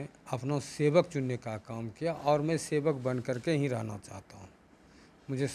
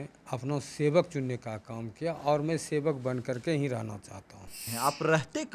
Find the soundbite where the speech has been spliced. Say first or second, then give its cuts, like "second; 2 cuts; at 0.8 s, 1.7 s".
second; 1 cut; at 4.6 s